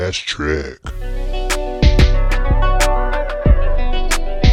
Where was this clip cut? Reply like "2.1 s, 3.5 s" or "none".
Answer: none